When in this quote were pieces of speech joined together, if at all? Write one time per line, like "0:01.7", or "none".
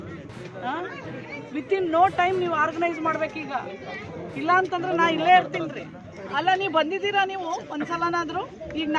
0:06.2